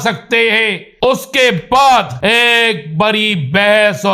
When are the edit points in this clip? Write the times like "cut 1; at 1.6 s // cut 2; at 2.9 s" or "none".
cut 1; at 1.1 s // cut 2; at 2.1 s